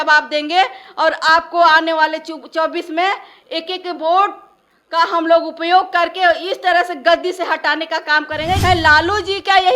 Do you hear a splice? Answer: yes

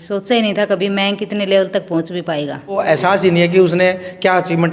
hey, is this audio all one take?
no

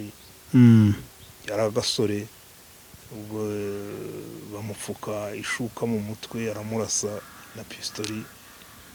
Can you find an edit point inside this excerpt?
no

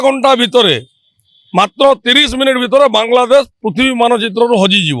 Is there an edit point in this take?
no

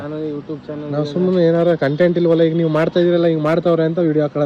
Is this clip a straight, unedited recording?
yes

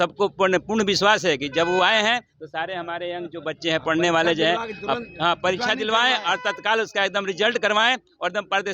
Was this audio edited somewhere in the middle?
no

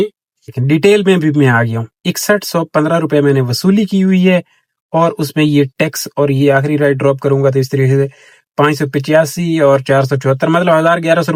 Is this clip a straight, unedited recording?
yes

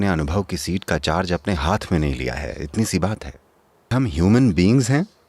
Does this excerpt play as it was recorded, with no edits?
no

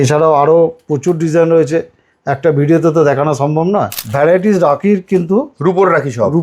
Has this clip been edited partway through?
yes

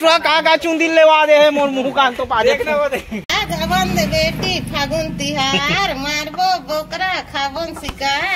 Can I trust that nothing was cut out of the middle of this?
no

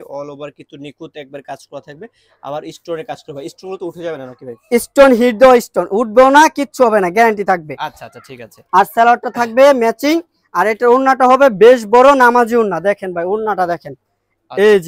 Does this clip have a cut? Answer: no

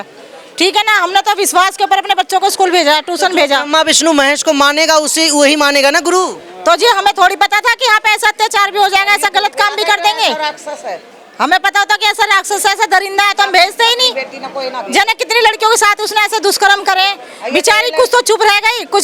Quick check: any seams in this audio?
no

